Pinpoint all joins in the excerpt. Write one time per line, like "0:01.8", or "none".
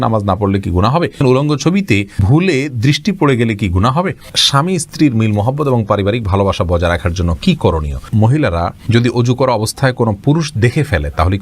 0:01.2
0:02.2
0:04.3
0:08.1